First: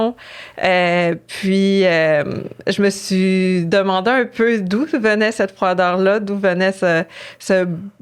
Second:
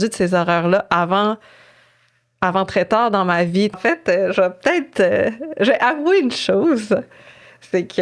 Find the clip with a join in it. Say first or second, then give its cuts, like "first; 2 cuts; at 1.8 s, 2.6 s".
second; 1 cut; at 3.8 s